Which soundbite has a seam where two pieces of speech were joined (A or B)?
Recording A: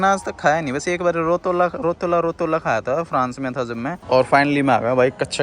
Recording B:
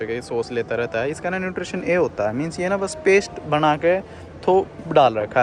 A